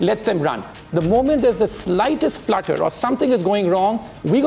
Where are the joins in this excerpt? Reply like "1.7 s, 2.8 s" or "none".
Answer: none